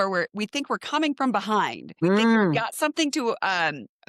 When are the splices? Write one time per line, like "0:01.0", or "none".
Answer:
0:01.8

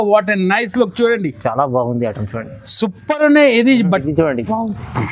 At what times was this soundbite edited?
0:04.0

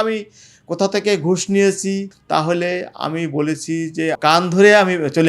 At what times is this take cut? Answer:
0:02.1
0:04.2

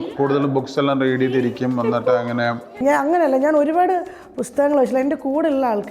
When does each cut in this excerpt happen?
0:02.6

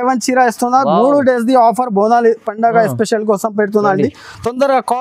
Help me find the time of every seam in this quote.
none

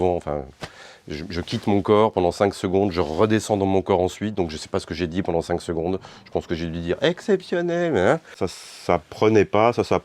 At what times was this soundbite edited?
0:08.3

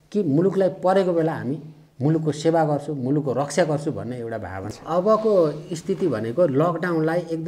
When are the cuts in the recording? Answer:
0:04.7

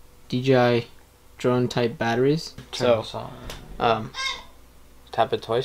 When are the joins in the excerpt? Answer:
0:02.6

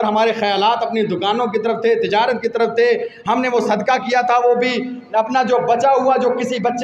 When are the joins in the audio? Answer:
none

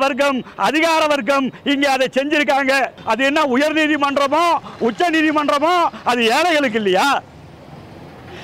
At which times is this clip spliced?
0:03.0

